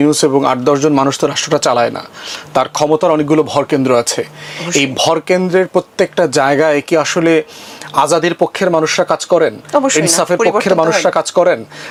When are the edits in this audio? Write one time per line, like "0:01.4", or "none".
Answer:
none